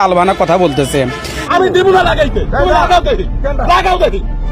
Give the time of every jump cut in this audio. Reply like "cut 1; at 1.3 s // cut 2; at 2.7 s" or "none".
cut 1; at 1.4 s